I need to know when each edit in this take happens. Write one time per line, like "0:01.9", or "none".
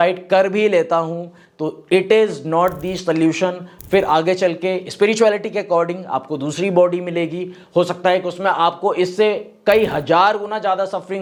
none

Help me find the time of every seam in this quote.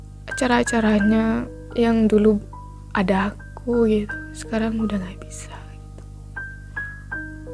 none

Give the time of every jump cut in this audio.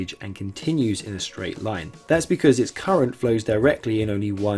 0:01.9

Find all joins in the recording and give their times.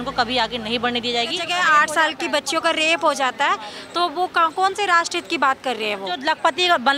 0:01.4
0:06.2

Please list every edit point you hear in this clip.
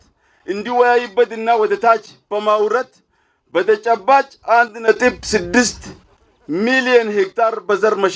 none

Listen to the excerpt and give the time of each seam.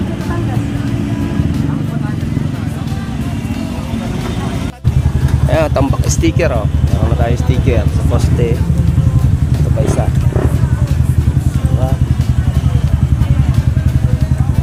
none

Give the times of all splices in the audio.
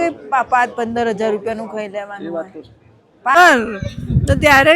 0:03.4

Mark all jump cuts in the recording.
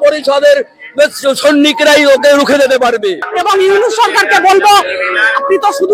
0:03.3

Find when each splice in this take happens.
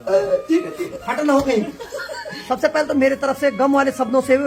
0:01.0
0:02.4

